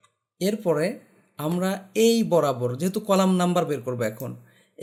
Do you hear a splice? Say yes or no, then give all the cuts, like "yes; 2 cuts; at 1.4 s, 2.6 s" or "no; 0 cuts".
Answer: no; 0 cuts